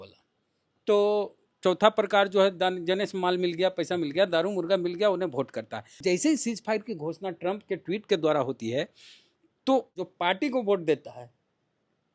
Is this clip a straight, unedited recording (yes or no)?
no